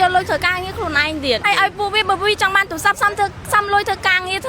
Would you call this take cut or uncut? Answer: cut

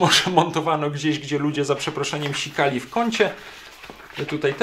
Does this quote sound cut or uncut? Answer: uncut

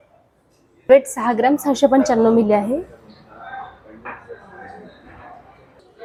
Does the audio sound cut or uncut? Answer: uncut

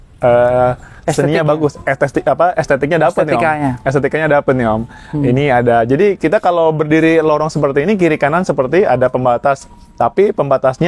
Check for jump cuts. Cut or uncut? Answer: uncut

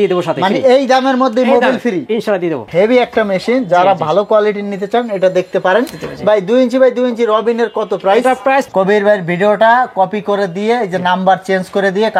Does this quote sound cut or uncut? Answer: cut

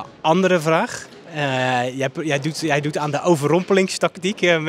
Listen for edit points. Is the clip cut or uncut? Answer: uncut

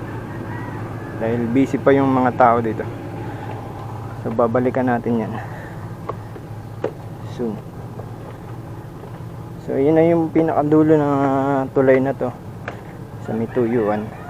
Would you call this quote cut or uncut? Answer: uncut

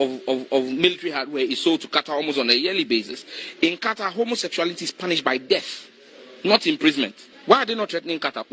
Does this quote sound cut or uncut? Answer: cut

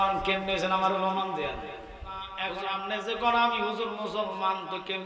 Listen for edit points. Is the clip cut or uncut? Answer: cut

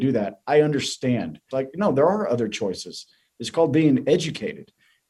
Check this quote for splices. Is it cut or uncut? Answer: cut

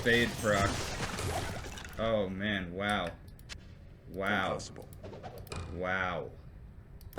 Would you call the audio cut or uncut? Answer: uncut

